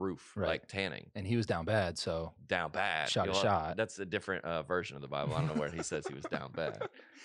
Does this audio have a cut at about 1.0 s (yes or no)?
no